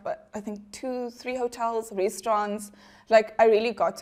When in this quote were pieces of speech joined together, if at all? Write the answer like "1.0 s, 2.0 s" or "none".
none

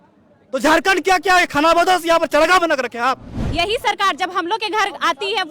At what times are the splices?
3.4 s

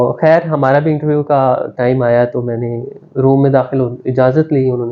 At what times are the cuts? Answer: none

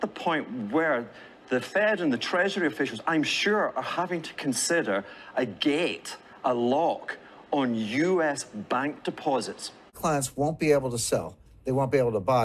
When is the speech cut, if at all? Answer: 10.0 s

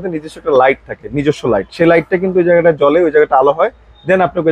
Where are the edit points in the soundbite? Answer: none

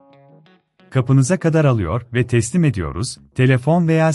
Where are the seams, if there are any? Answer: 0.9 s

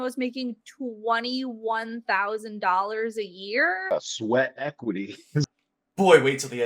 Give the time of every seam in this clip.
3.8 s, 5.5 s

